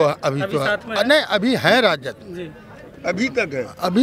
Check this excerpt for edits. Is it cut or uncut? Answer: uncut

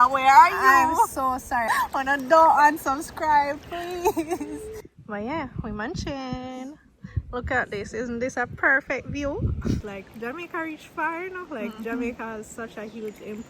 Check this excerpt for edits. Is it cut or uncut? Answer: cut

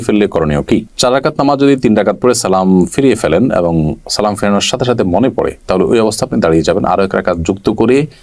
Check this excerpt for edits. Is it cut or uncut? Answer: uncut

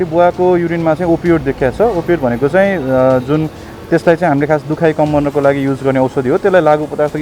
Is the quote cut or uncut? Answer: uncut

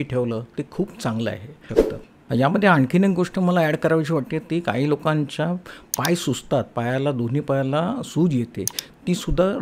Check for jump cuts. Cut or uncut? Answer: cut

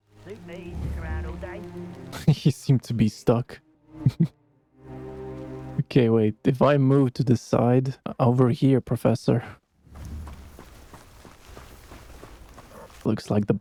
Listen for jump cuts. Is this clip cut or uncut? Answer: uncut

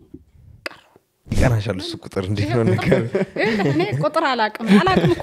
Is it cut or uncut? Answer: cut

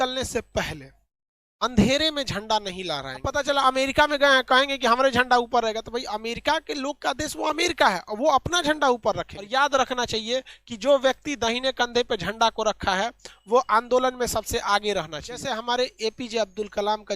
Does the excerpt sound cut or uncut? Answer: cut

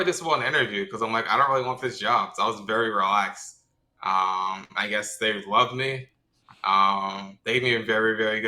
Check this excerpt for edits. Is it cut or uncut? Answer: uncut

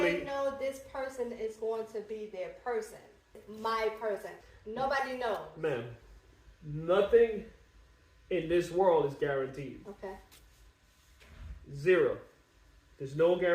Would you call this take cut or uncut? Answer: cut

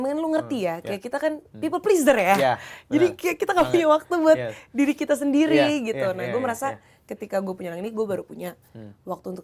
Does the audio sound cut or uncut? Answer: uncut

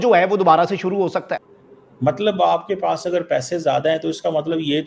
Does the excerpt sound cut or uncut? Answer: cut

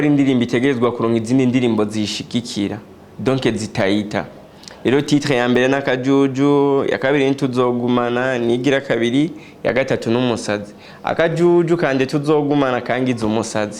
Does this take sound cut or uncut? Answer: uncut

